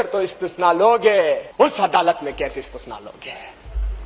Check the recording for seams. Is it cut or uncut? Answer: cut